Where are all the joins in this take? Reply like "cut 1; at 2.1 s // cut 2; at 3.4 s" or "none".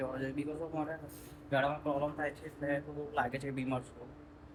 none